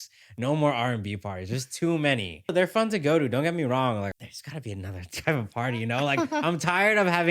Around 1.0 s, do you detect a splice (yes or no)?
no